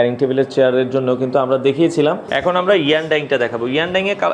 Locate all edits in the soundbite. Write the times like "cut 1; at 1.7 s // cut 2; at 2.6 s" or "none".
cut 1; at 2.2 s